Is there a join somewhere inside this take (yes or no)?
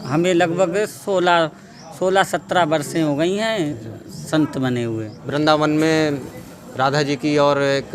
yes